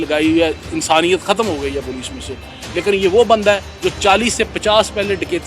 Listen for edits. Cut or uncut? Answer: cut